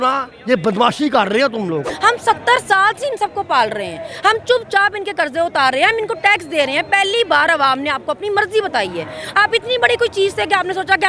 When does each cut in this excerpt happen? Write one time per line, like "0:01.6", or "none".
0:01.9